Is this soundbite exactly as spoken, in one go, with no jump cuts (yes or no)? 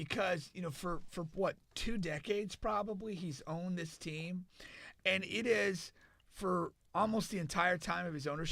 yes